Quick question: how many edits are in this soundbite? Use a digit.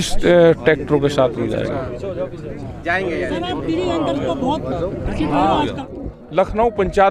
1